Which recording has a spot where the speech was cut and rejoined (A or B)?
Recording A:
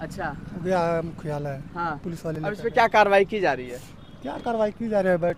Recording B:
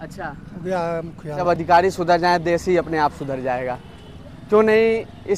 B